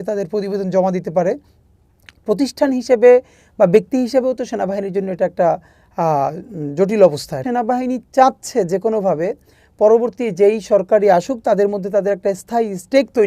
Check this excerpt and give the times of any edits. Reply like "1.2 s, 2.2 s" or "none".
7.3 s